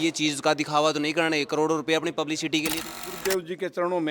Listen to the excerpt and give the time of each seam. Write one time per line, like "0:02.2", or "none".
0:02.8